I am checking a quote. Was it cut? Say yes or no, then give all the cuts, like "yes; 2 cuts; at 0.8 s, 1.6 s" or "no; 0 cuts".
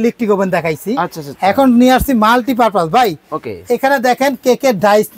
no; 0 cuts